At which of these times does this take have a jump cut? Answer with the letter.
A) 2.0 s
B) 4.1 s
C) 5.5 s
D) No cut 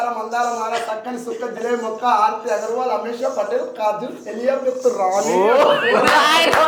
D